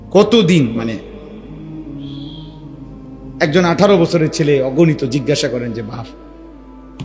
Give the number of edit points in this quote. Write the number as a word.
two